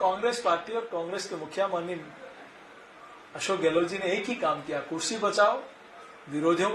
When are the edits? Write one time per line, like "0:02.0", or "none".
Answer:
none